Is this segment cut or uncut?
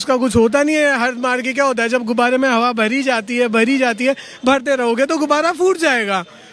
uncut